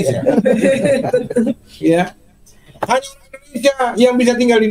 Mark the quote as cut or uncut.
cut